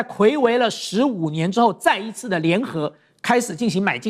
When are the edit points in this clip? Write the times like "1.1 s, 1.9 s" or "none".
none